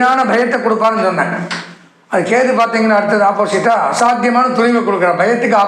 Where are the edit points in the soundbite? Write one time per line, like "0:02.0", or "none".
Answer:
none